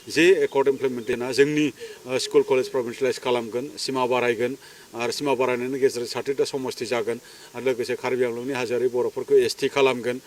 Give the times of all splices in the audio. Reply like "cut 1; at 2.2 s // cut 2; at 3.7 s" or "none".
cut 1; at 1.2 s